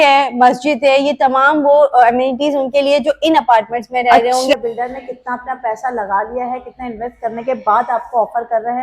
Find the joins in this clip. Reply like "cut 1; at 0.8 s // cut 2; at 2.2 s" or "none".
cut 1; at 4.5 s